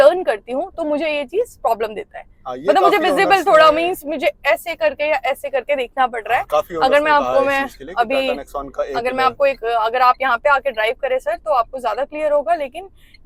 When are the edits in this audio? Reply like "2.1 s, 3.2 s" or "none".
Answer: none